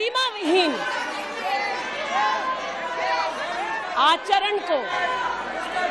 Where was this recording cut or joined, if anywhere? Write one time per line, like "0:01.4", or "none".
none